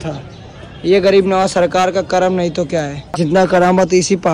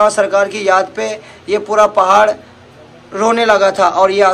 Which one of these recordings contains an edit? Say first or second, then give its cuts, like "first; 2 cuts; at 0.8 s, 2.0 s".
first; 1 cut; at 3.2 s